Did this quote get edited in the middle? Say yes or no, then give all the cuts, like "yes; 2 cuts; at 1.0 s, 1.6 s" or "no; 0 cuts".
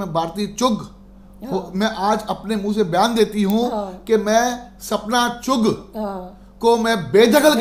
no; 0 cuts